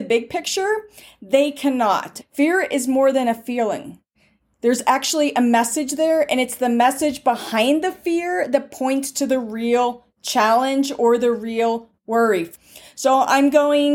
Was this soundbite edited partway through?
yes; 2 cuts; at 2.2 s, 12.5 s

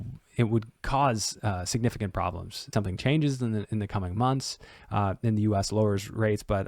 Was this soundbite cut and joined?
yes; 1 cut; at 2.7 s

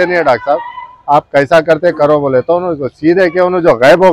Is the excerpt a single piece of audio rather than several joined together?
yes; 0 cuts

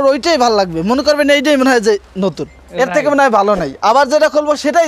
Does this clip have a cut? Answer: no; 0 cuts

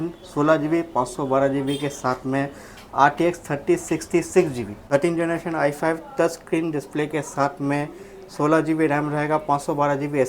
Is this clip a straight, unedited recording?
no; 1 cut; at 4.7 s

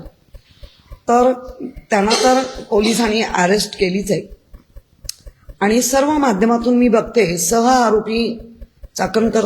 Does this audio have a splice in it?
no; 0 cuts

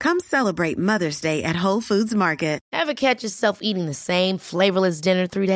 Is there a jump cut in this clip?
yes; 1 cut; at 2.7 s

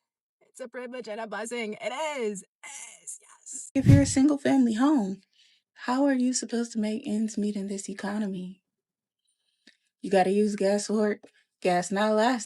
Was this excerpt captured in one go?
no; 1 cut; at 3.7 s

